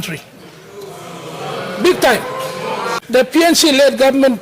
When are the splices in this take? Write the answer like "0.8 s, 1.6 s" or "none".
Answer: 3.0 s